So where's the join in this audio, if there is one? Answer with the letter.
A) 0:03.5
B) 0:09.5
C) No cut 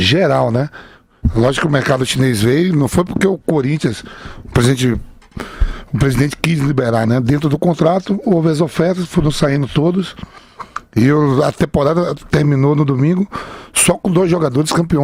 C